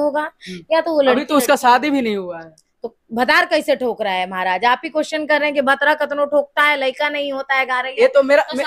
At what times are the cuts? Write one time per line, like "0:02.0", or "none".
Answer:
none